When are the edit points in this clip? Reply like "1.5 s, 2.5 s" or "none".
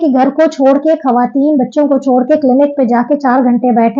none

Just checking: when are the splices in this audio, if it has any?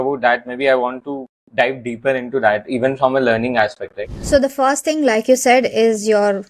4.1 s

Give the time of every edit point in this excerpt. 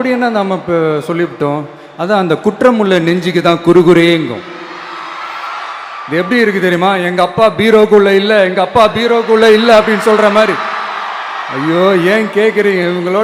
none

